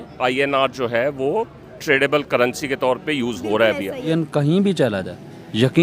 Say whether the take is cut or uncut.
cut